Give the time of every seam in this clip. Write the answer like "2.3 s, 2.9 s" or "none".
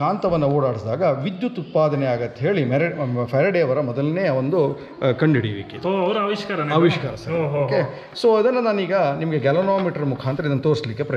none